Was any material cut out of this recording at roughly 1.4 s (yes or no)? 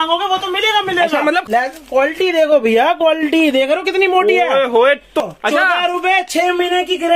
yes